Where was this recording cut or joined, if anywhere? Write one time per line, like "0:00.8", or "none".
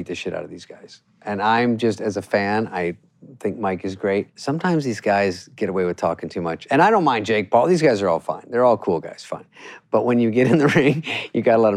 0:04.3
0:06.6